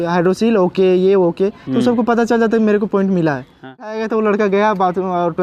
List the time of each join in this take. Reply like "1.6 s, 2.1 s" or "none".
3.9 s